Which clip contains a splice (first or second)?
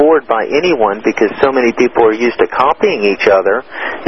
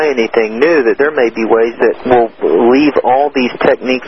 second